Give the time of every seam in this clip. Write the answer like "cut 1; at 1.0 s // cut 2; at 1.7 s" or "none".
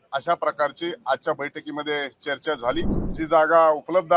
cut 1; at 3.0 s